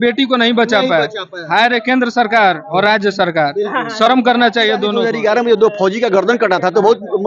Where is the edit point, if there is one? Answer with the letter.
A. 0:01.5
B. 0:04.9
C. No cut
B